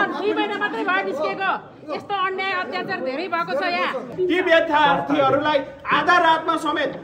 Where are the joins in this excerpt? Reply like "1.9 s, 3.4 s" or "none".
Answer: 4.1 s

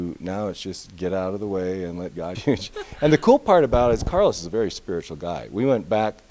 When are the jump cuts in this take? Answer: none

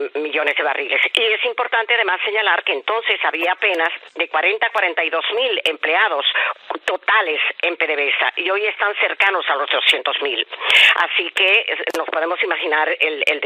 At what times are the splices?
3.1 s

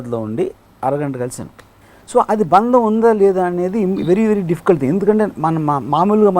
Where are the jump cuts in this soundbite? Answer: none

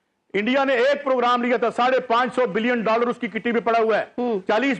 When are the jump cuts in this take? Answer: none

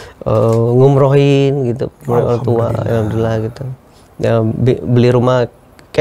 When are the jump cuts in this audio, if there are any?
none

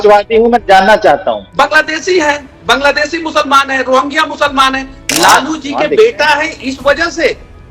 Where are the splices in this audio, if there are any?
1.5 s, 4.9 s

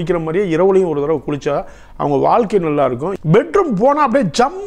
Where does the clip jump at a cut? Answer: 3.1 s

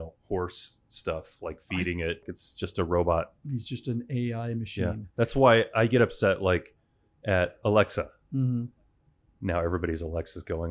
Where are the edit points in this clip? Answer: 2.3 s

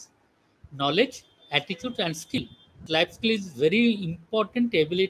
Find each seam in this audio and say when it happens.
2.8 s

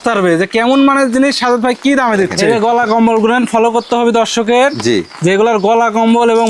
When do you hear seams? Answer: 2.4 s

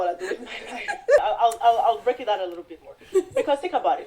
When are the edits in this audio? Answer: 1.2 s

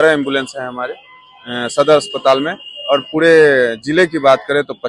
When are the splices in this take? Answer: none

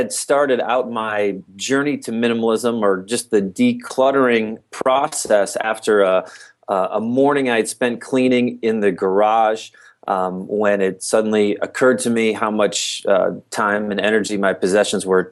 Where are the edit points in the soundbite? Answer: none

